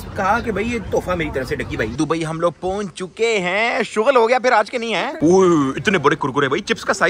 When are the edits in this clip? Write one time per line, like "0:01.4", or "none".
0:01.9
0:05.1

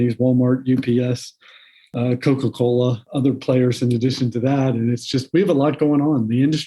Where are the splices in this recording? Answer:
0:01.9

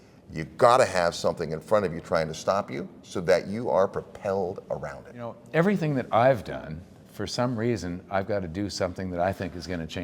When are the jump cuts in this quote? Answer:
0:05.4

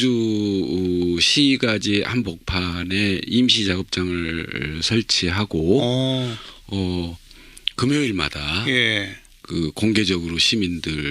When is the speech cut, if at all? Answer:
0:01.8

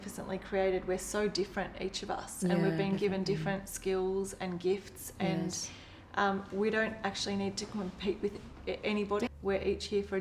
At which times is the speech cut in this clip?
0:09.3

